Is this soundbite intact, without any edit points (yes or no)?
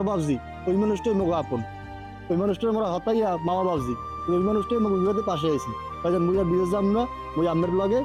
yes